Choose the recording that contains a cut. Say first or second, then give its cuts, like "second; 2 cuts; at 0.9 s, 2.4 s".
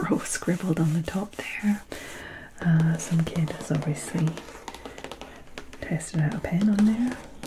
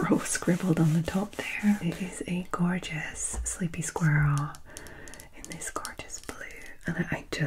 second; 1 cut; at 2.0 s